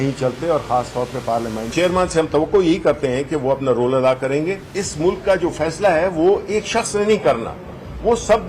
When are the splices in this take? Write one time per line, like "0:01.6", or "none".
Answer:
0:01.7
0:04.7